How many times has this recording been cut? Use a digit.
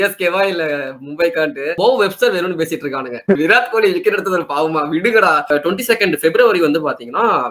3